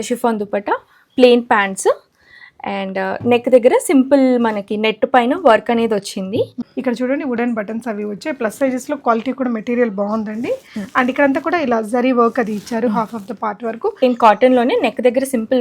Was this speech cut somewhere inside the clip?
yes; 2 cuts; at 6.6 s, 14.0 s

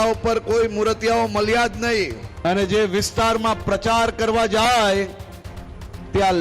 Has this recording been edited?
yes; 1 cut; at 2.2 s

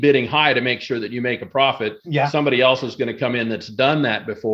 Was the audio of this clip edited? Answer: no; 0 cuts

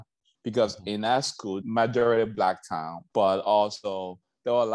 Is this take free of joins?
no; 2 cuts; at 1.6 s, 2.9 s

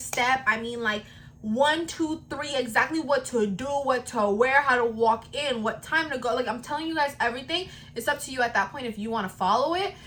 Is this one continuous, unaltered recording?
yes; 0 cuts

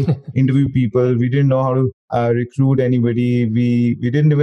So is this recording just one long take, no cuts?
yes; 0 cuts

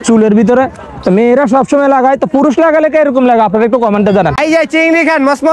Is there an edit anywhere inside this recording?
yes; 1 cut; at 4.4 s

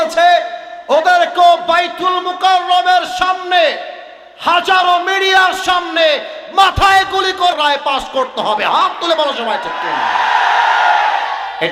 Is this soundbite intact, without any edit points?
yes; 0 cuts

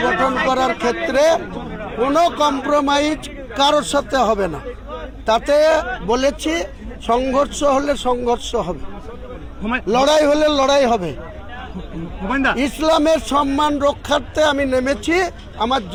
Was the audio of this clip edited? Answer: no; 0 cuts

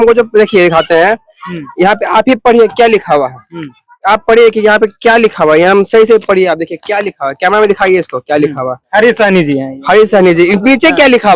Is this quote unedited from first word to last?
yes; 0 cuts

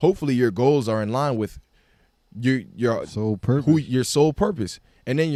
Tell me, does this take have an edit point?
no; 0 cuts

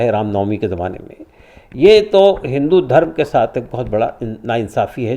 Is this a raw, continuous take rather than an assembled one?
yes; 0 cuts

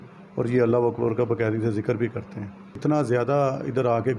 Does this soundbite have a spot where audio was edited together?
yes; 1 cut; at 2.8 s

